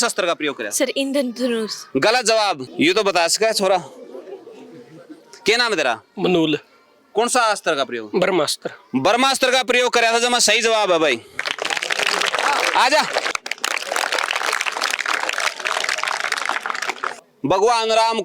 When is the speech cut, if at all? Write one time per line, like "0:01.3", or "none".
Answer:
0:02.7
0:13.3
0:17.4